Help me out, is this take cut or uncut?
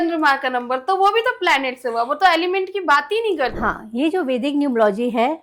cut